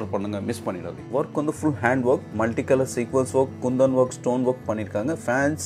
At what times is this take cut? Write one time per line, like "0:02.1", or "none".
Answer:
0:00.9